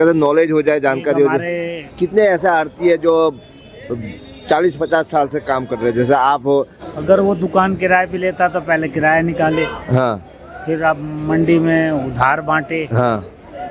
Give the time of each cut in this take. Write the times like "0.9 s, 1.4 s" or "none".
1.9 s, 6.8 s